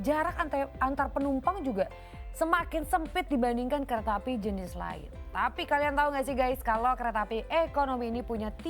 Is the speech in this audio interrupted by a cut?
no; 0 cuts

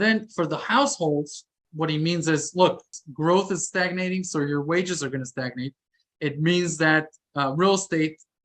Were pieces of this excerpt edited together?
yes; 2 cuts; at 1.6 s, 3.0 s

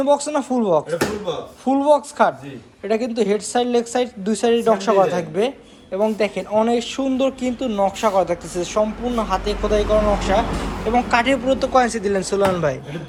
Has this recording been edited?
no; 0 cuts

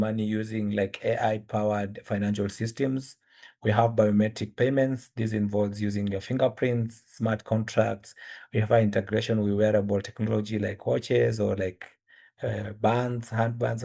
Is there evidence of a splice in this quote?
no; 0 cuts

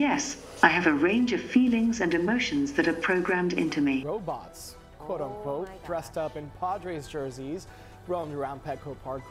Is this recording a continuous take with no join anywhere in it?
no; 1 cut; at 4.1 s

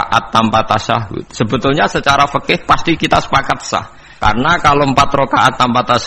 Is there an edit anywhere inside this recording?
yes; 1 cut; at 4.0 s

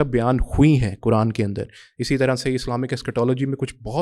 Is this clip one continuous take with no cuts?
yes; 0 cuts

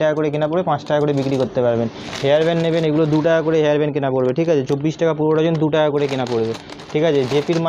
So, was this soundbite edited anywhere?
no; 0 cuts

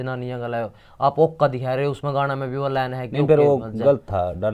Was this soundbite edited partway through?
no; 0 cuts

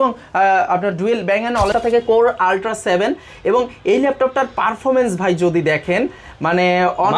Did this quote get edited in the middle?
yes; 1 cut; at 1.7 s

